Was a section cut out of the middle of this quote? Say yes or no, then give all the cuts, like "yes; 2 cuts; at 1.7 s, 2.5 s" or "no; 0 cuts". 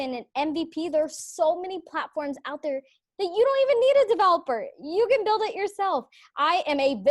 no; 0 cuts